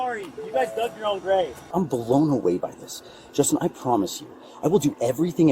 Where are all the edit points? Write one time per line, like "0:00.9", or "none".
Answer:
0:01.6